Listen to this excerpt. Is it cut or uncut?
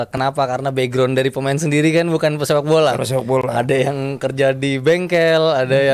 uncut